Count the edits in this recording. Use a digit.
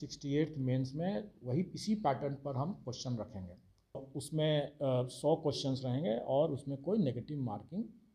1